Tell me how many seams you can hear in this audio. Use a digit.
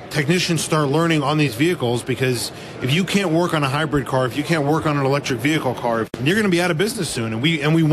1